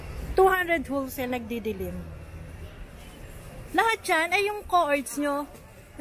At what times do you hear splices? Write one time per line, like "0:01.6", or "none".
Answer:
none